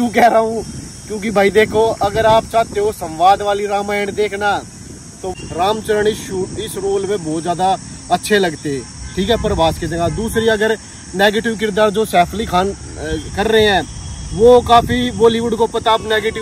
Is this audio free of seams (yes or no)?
no